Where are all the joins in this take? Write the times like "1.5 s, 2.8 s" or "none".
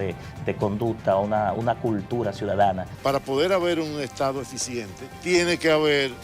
2.9 s, 5.0 s